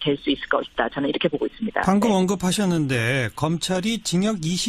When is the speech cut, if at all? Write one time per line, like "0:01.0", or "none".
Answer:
0:02.1